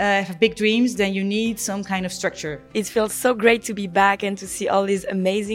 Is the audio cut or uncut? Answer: cut